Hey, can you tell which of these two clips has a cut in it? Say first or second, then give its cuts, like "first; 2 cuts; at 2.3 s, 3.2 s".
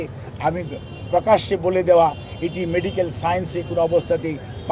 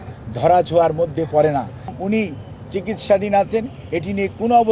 second; 1 cut; at 1.9 s